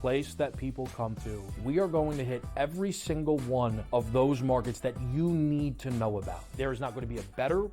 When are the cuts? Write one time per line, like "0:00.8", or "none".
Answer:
0:01.5
0:03.8
0:06.5